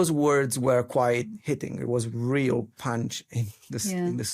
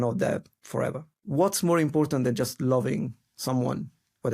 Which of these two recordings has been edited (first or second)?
second